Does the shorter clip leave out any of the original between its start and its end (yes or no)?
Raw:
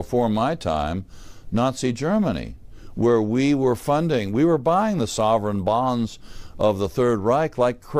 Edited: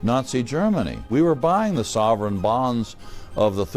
yes